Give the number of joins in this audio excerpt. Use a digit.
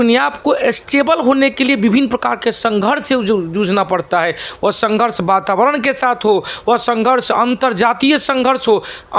0